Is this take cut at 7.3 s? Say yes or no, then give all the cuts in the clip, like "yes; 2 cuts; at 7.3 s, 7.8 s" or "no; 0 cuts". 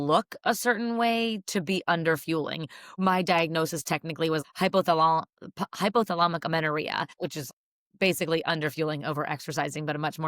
yes; 3 cuts; at 2.9 s, 4.4 s, 7.3 s